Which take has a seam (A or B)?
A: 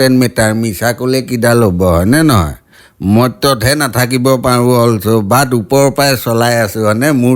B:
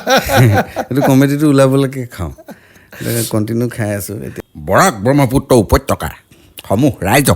B